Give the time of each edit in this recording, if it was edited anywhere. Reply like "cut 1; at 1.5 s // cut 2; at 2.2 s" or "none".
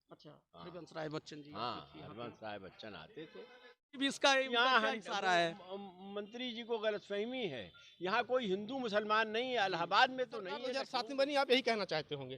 cut 1; at 3.9 s // cut 2; at 10.7 s